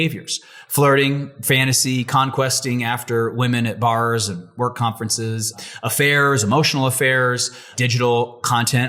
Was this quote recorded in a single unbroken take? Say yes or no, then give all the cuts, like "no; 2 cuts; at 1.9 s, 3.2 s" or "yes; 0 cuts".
no; 2 cuts; at 5.5 s, 7.6 s